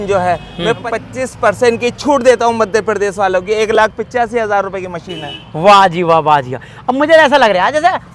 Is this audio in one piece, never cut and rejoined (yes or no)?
yes